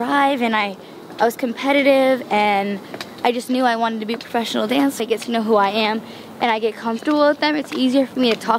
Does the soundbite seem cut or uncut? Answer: cut